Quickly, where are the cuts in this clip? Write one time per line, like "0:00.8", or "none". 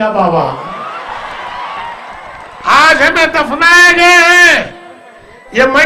none